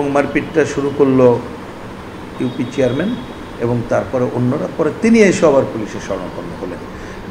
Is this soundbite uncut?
yes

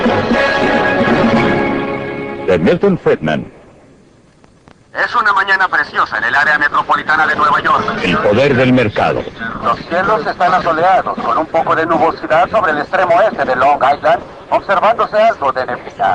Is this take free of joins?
no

